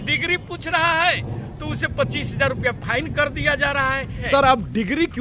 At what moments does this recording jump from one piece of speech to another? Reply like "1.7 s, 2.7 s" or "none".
4.2 s